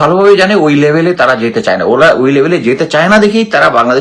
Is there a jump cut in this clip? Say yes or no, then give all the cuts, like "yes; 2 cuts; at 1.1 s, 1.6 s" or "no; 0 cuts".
no; 0 cuts